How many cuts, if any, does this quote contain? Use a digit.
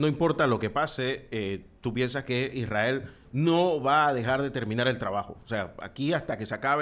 0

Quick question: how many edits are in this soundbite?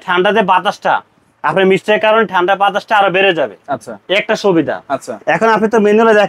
0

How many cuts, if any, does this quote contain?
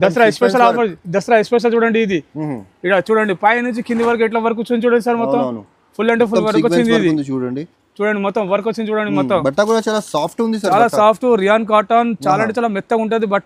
0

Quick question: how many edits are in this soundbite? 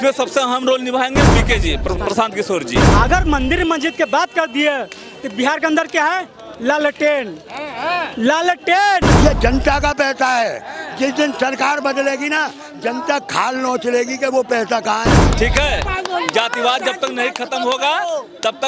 4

